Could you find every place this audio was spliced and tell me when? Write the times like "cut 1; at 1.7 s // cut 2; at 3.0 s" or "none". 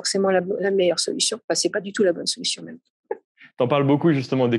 cut 1; at 3.1 s